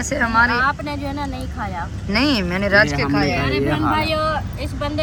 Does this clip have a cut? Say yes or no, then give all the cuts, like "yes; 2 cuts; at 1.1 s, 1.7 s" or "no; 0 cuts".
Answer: no; 0 cuts